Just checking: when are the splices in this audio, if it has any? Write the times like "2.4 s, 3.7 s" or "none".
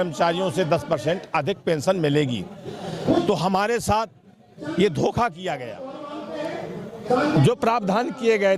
none